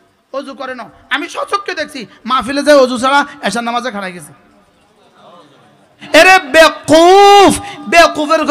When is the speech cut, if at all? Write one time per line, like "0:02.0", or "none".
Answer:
0:06.0

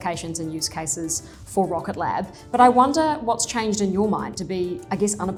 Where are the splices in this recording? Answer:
none

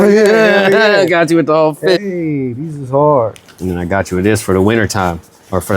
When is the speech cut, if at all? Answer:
0:02.0
0:03.6

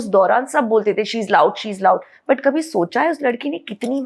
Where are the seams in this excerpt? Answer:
none

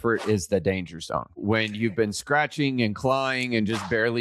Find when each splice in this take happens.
0:01.4

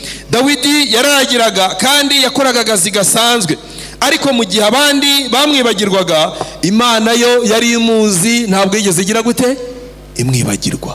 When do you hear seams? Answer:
none

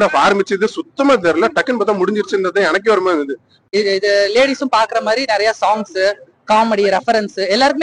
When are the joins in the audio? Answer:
0:03.6

